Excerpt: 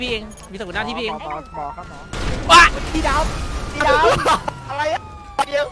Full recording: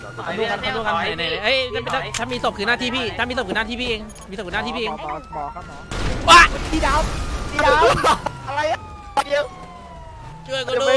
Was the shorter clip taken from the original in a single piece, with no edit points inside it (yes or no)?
yes